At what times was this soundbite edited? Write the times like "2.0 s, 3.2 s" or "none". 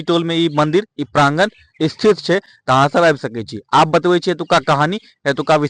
none